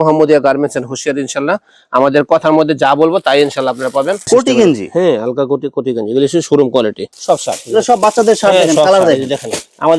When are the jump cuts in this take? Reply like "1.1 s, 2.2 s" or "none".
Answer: 4.3 s, 7.1 s